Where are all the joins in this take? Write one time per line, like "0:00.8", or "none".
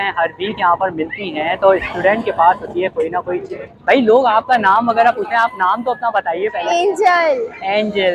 none